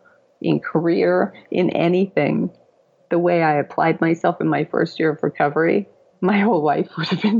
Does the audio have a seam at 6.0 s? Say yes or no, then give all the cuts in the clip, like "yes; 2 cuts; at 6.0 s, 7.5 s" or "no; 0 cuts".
yes; 1 cut; at 6.0 s